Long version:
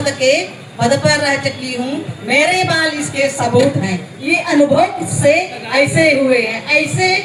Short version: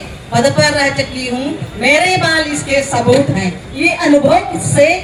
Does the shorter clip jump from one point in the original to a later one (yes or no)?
no